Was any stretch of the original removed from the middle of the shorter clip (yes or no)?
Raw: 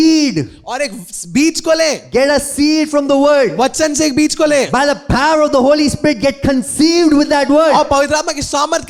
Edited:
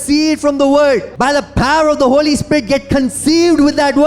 yes